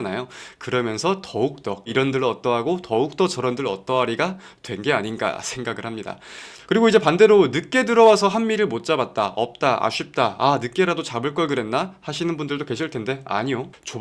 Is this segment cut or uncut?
cut